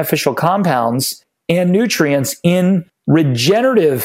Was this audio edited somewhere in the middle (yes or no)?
no